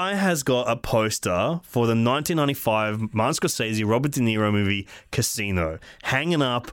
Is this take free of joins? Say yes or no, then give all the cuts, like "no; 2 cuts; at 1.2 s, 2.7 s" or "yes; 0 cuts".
yes; 0 cuts